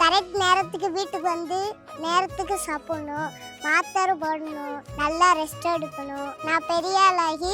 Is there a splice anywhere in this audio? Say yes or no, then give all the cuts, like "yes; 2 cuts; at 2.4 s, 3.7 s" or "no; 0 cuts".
yes; 2 cuts; at 4.8 s, 6.3 s